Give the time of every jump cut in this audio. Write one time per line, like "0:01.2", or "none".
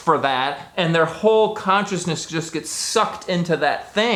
none